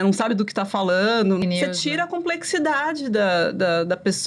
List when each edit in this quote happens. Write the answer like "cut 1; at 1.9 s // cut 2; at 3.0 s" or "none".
cut 1; at 1.4 s

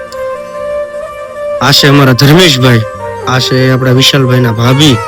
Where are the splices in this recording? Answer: cut 1; at 1.1 s

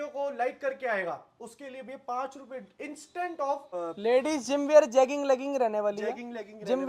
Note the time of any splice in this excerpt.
cut 1; at 3.7 s

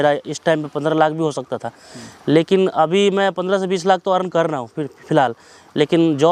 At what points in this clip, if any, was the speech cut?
none

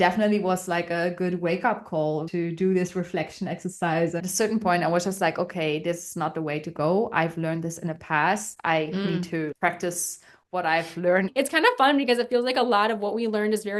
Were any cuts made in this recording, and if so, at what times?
cut 1; at 2.3 s // cut 2; at 4.2 s // cut 3; at 11.3 s

